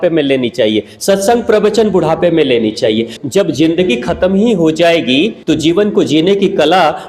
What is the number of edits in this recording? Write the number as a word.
two